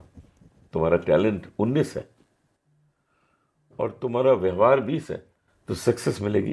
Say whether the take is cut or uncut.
uncut